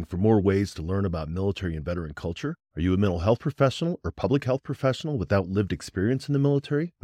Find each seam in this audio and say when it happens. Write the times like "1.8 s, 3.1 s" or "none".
none